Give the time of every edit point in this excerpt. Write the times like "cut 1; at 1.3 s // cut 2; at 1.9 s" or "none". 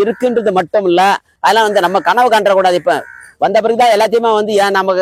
cut 1; at 1.3 s

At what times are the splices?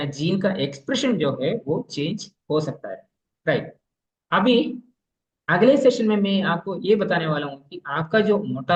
none

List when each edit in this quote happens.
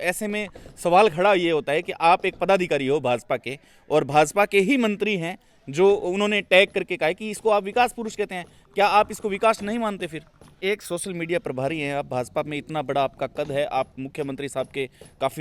cut 1; at 10.5 s

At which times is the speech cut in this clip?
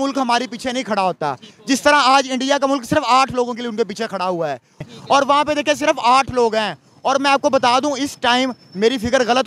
cut 1; at 4.8 s

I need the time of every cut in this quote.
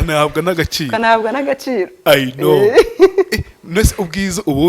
none

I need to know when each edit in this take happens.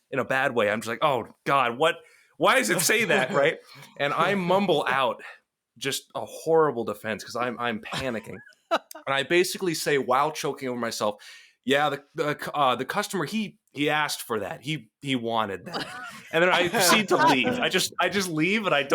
none

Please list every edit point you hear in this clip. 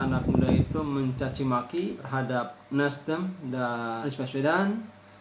cut 1; at 2.0 s // cut 2; at 4.0 s

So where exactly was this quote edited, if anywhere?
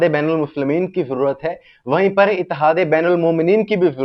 none

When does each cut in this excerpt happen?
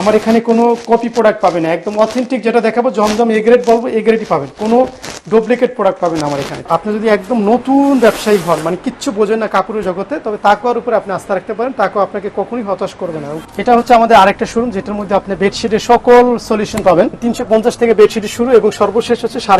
cut 1; at 6.6 s // cut 2; at 13.3 s // cut 3; at 17.2 s

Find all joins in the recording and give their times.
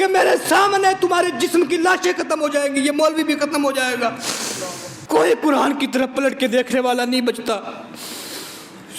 cut 1; at 4.9 s

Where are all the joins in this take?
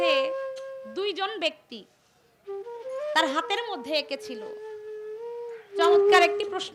none

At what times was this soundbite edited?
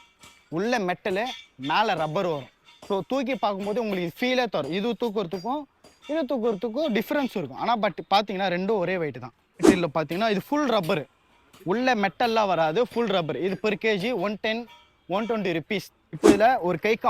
cut 1; at 9.6 s // cut 2; at 16.0 s

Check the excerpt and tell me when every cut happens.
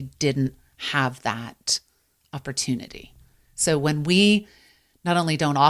none

